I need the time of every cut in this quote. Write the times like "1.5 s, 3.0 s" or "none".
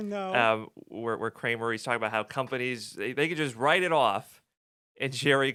none